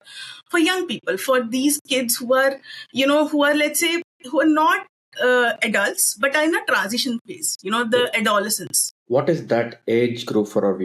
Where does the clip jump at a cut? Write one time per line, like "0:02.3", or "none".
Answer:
none